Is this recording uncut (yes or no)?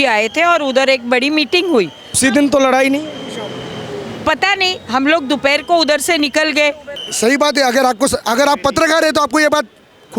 no